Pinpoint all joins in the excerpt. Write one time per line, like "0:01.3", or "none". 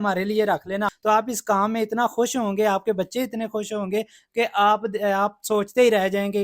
0:00.9